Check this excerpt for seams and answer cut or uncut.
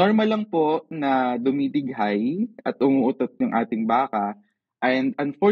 uncut